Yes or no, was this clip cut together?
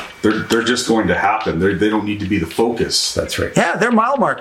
no